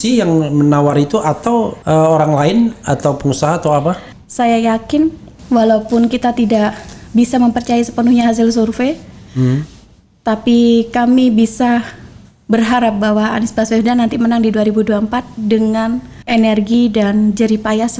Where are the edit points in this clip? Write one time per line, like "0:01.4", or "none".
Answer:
0:01.8
0:04.1